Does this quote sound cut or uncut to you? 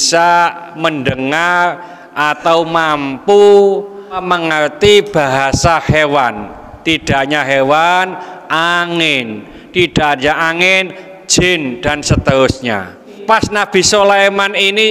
cut